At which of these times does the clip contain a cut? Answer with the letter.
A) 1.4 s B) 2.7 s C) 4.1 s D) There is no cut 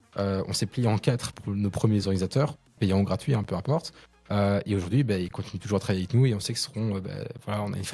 D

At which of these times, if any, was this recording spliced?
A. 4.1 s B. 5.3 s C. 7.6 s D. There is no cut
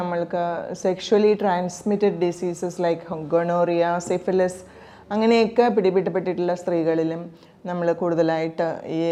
D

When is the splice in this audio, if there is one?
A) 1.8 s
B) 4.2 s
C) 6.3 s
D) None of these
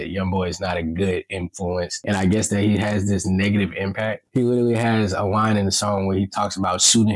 B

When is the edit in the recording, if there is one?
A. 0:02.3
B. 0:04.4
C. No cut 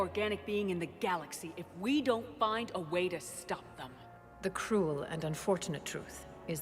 B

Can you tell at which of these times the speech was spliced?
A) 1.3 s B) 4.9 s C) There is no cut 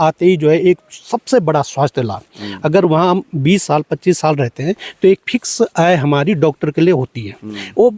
C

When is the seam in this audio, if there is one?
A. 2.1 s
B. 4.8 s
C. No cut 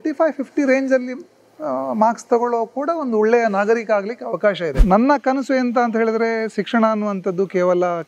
B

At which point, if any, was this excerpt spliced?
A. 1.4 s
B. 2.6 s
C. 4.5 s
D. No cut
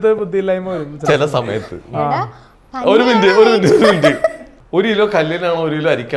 C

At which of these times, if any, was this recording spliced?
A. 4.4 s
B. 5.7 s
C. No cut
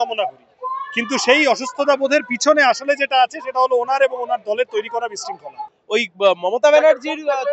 B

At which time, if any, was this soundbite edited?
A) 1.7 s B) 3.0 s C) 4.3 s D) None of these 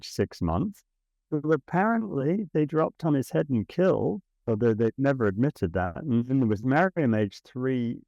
C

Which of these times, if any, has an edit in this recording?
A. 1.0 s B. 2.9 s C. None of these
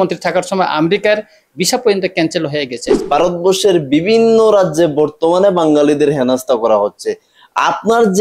B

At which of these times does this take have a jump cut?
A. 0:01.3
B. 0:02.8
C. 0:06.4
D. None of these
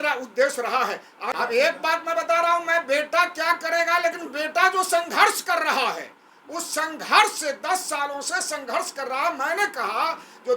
A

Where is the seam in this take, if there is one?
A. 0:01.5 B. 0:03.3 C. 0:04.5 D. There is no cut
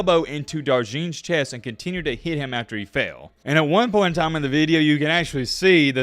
B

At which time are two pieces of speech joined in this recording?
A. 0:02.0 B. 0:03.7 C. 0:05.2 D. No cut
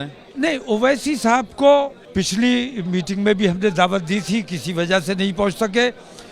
A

